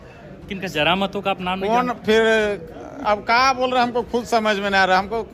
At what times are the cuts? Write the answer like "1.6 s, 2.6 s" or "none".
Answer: none